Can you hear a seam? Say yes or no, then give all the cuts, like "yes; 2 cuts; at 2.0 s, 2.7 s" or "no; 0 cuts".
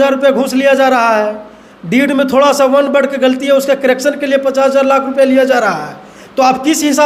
no; 0 cuts